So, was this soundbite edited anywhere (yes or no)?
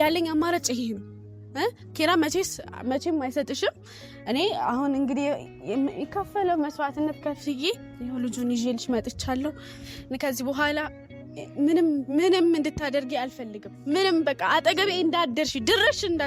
no